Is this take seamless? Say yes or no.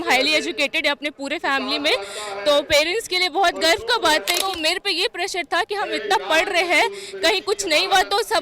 no